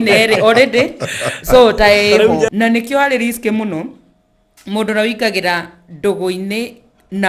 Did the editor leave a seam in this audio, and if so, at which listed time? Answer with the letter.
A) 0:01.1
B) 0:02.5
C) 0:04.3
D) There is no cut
B